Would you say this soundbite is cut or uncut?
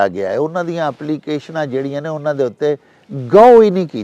uncut